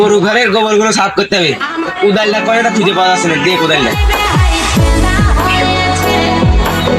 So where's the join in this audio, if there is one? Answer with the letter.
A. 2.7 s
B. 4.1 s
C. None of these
C